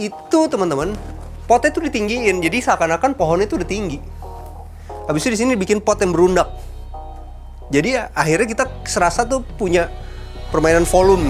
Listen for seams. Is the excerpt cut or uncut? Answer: uncut